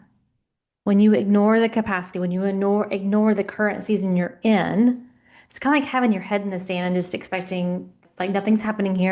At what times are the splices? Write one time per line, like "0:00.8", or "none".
0:08.0